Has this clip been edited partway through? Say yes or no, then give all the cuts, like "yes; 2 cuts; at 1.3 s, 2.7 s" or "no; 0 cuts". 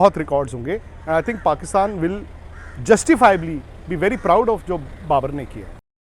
no; 0 cuts